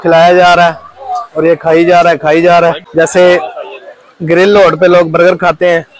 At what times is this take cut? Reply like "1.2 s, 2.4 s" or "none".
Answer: 2.8 s